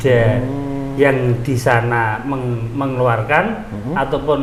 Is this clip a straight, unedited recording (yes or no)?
yes